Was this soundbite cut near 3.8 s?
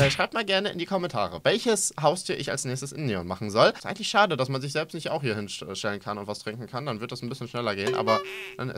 yes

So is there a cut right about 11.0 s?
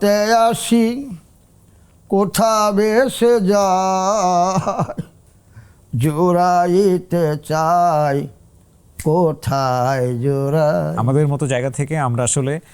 yes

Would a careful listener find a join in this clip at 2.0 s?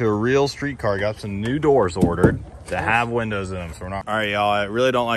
no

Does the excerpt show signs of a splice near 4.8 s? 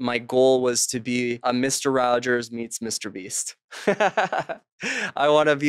no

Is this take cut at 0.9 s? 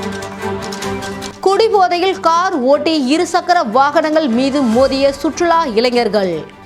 no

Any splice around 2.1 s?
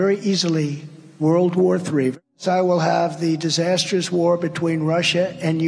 yes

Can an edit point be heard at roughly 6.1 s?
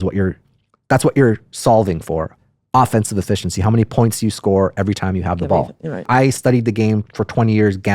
yes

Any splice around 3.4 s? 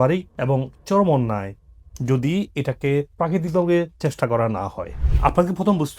no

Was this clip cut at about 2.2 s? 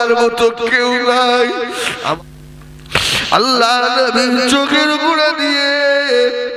yes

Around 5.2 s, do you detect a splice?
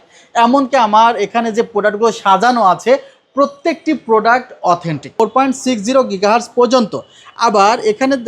yes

